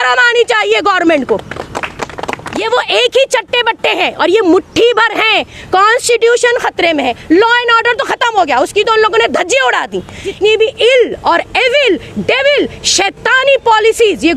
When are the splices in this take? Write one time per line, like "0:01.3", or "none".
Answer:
0:02.6
0:05.5
0:10.3

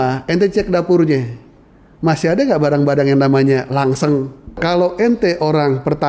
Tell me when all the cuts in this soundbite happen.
0:04.6

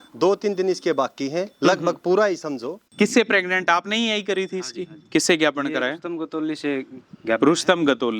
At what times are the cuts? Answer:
0:02.8

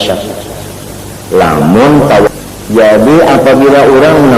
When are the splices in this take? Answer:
0:02.3

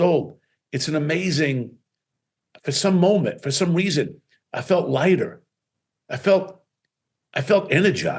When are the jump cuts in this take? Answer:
none

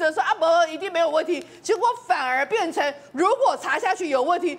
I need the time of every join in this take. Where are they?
none

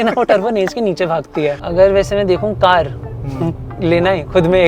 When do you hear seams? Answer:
0:01.6

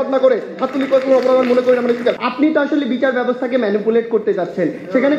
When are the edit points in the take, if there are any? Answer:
0:02.2

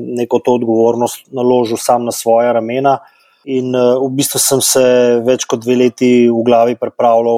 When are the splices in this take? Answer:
none

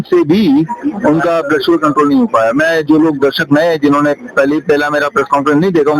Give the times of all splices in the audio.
none

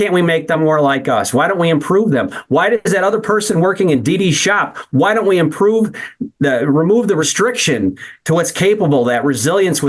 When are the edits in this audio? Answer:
0:07.3

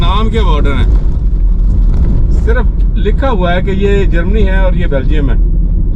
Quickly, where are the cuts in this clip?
none

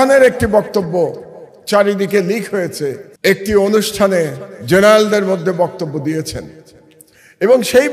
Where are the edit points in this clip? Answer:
0:03.1

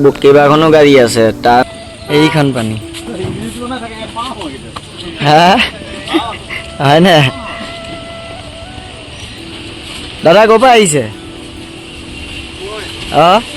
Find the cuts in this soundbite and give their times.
0:01.6

